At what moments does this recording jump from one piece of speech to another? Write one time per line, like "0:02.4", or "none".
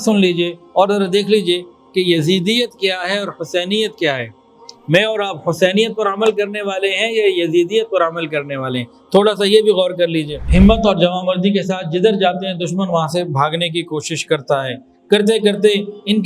0:10.4